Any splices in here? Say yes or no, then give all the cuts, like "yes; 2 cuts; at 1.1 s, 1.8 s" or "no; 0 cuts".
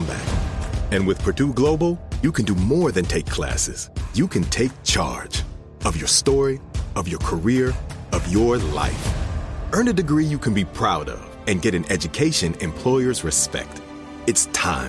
no; 0 cuts